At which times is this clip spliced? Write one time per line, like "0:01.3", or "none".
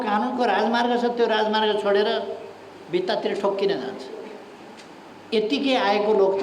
0:05.1